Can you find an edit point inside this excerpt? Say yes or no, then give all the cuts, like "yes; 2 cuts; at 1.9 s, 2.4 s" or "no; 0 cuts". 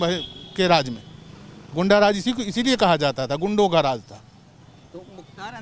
no; 0 cuts